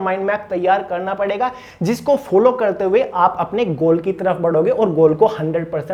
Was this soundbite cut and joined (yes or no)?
no